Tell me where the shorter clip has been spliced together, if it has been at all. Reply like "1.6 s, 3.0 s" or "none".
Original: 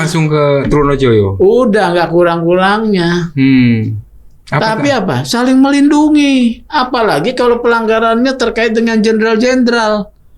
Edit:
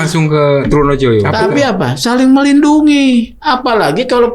1.3 s